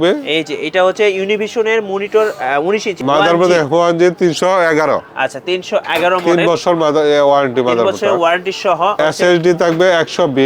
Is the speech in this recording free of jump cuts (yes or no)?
no